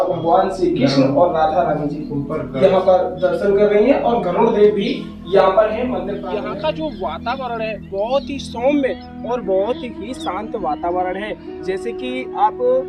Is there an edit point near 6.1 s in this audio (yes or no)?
yes